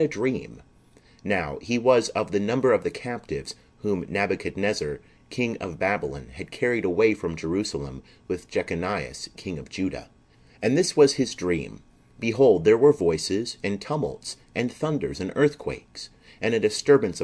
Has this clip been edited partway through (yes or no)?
yes